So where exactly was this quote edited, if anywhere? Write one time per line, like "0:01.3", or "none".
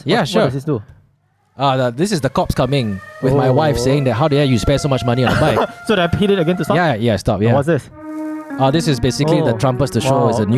none